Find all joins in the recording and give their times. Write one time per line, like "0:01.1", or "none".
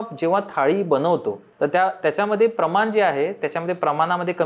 0:01.4